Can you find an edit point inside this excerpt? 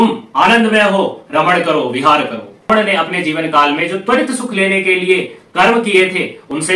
yes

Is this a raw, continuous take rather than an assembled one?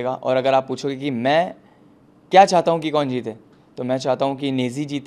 yes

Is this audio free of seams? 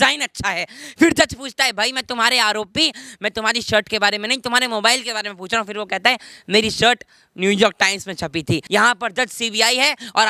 yes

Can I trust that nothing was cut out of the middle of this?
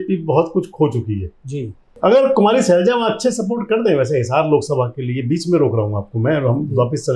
no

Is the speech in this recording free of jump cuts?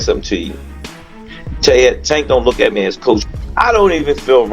no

